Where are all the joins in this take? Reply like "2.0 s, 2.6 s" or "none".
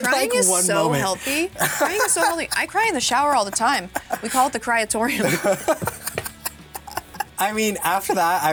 none